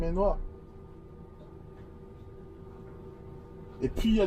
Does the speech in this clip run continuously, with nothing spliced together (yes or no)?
yes